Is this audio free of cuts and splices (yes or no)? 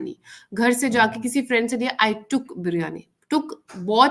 yes